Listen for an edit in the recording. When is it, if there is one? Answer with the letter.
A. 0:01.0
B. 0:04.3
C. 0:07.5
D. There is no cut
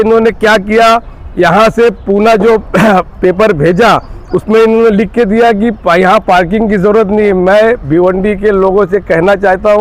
D